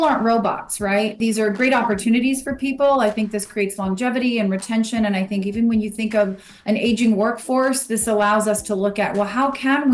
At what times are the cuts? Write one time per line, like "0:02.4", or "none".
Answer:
0:01.2